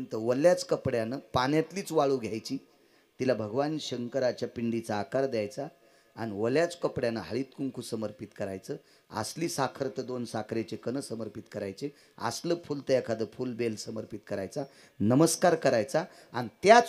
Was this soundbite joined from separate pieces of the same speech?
no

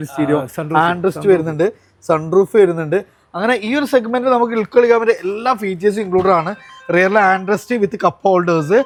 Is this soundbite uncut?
yes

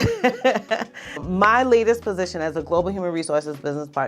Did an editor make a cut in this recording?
yes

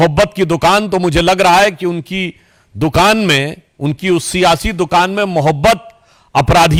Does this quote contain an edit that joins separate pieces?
no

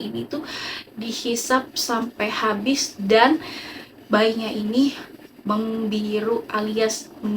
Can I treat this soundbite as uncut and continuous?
yes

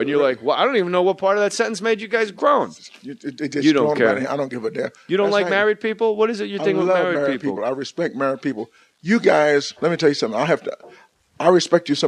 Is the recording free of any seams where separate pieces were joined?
yes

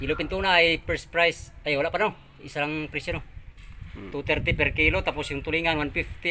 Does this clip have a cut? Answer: no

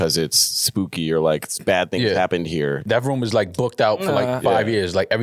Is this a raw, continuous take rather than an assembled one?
no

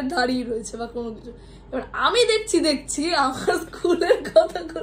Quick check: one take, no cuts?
yes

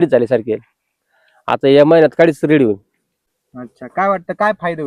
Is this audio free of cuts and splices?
yes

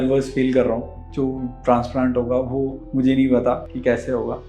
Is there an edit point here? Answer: yes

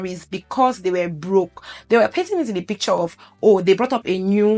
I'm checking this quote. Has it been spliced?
yes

